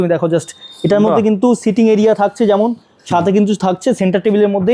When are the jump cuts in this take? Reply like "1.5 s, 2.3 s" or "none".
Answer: none

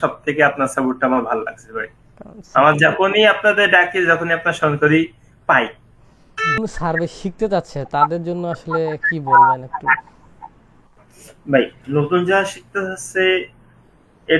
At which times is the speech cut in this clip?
6.6 s

